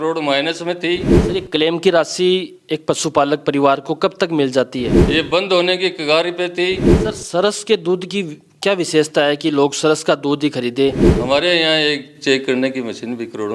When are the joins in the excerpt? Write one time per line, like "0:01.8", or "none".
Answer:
0:01.1
0:05.0
0:06.9
0:11.1